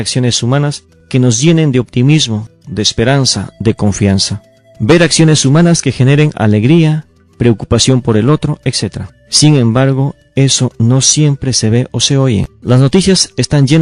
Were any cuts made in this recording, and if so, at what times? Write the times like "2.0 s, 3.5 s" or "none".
9.6 s